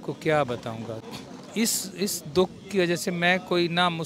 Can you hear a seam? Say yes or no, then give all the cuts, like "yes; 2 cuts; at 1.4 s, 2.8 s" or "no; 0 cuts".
no; 0 cuts